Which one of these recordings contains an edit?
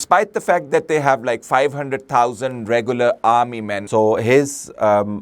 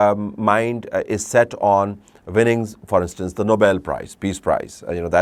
first; 1 cut; at 3.8 s

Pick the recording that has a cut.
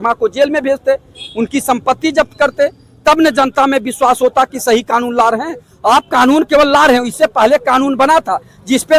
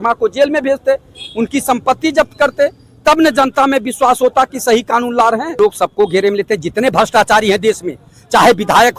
second; 1 cut; at 5.5 s

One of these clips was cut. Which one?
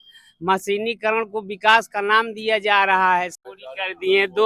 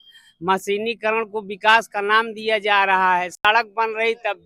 first; 1 cut; at 3.3 s

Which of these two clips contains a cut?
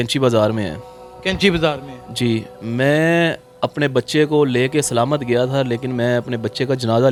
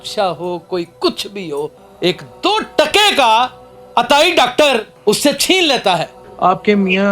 second; 1 cut; at 6.2 s

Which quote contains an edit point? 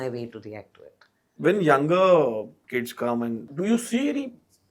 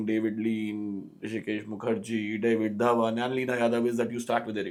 first; 3 cuts; at 1.3 s, 2.6 s, 3.5 s

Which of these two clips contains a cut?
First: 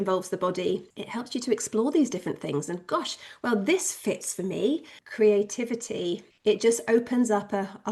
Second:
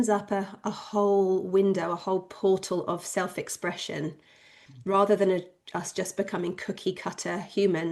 first; 3 cuts; at 1.0 s, 5.0 s, 6.3 s

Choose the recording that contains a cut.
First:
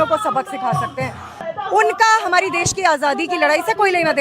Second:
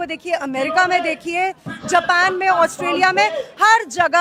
first; 1 cut; at 1.5 s

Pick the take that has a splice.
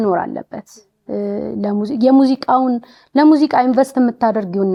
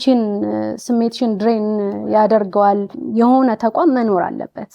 second; 1 cut; at 3.0 s

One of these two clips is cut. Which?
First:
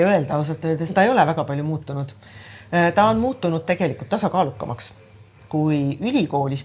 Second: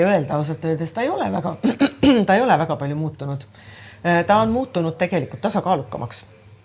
first; 2 cuts; at 0.9 s, 5.4 s

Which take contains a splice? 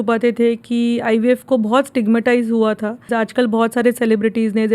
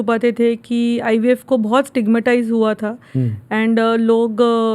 first; 1 cut; at 3.1 s

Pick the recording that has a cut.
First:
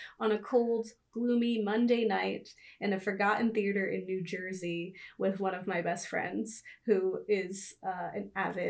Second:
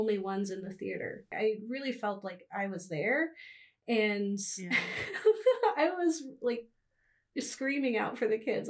second; 1 cut; at 1.3 s

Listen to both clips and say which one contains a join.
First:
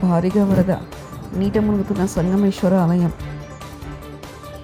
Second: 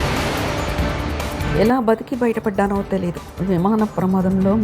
second; 1 cut; at 1.4 s

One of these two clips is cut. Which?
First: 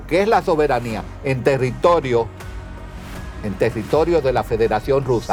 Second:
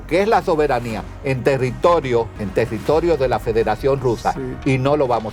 second; 1 cut; at 2.4 s

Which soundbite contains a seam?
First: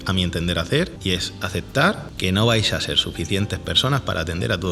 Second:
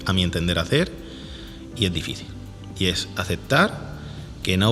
first; 2 cuts; at 1.0 s, 2.1 s

